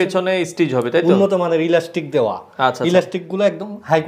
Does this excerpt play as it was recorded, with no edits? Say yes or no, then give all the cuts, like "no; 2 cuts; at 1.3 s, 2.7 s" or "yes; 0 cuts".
yes; 0 cuts